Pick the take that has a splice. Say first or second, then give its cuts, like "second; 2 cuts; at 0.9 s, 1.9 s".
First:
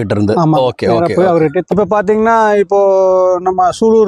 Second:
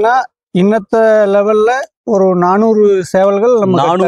first; 1 cut; at 1.7 s